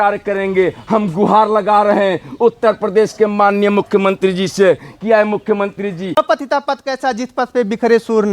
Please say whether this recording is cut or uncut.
cut